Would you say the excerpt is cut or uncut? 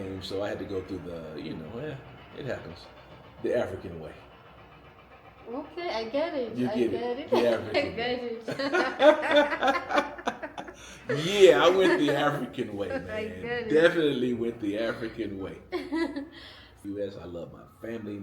cut